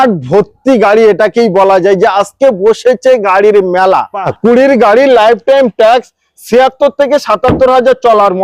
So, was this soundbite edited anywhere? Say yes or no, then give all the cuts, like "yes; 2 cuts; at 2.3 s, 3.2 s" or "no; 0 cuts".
yes; 1 cut; at 4.3 s